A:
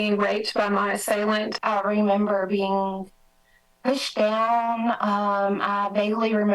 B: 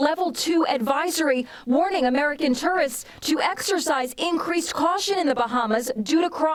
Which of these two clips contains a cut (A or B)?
A